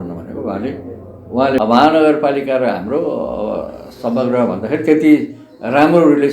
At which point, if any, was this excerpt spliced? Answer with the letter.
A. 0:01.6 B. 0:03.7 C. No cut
A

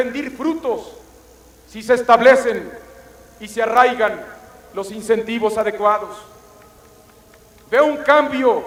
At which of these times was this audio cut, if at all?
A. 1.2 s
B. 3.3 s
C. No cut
C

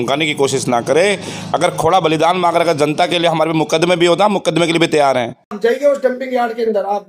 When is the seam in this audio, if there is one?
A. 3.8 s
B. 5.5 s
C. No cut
B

